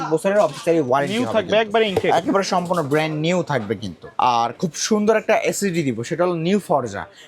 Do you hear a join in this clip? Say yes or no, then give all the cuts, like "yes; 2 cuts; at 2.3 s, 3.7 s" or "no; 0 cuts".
no; 0 cuts